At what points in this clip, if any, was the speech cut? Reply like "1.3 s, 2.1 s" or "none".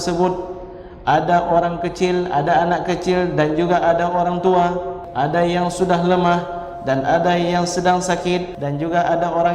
5.0 s, 8.5 s